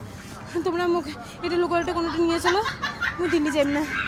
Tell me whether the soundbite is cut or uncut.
uncut